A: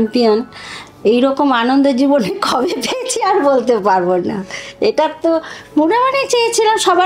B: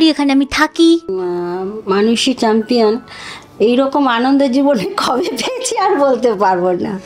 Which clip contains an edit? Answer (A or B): B